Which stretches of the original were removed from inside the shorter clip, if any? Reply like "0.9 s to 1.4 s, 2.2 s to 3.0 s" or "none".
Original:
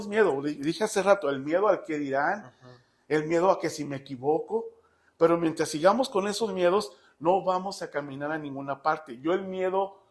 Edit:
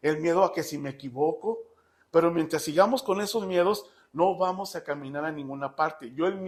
none